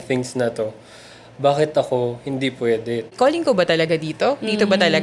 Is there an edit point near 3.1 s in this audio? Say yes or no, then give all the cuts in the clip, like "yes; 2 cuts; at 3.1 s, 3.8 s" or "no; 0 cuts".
yes; 1 cut; at 3.1 s